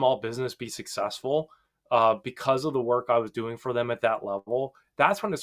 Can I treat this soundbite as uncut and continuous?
yes; 0 cuts

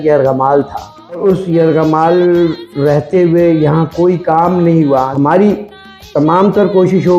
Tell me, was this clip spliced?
yes; 2 cuts; at 1.2 s, 5.1 s

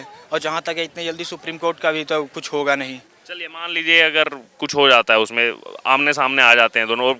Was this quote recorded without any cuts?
yes; 0 cuts

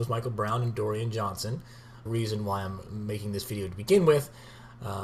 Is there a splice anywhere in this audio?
no; 0 cuts

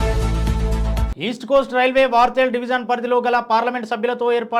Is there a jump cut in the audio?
yes; 1 cut; at 1.1 s

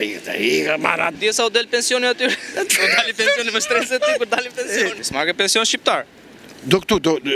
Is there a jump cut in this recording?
yes; 2 cuts; at 1.2 s, 5.0 s

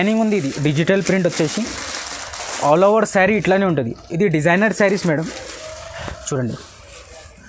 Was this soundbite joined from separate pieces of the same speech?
no; 0 cuts

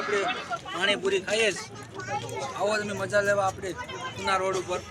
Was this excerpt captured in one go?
yes; 0 cuts

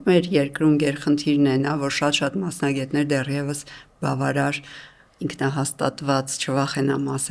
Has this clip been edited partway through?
no; 0 cuts

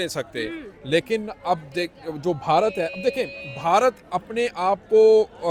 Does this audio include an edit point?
no; 0 cuts

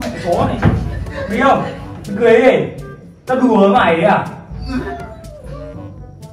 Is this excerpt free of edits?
yes; 0 cuts

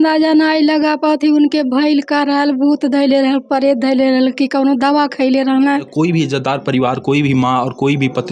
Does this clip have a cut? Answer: yes; 1 cut; at 5.9 s

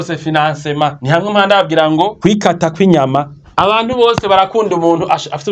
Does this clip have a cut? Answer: yes; 3 cuts; at 1.0 s, 2.1 s, 3.4 s

